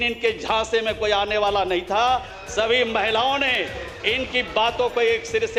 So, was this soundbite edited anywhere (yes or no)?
no